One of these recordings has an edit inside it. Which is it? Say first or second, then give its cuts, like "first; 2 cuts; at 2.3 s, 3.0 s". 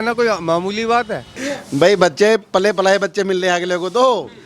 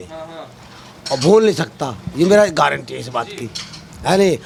first; 1 cut; at 1.4 s